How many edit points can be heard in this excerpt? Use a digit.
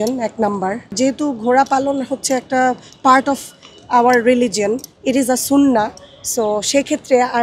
1